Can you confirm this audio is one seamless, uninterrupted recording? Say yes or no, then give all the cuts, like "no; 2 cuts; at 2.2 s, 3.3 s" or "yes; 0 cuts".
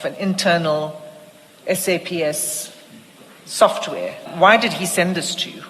no; 1 cut; at 4.3 s